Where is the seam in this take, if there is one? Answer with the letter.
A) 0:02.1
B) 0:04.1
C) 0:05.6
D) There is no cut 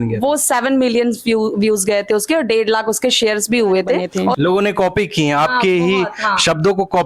B